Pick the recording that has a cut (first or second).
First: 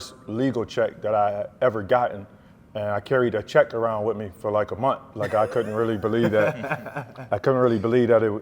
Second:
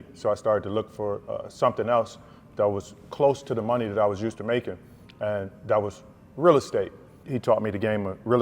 second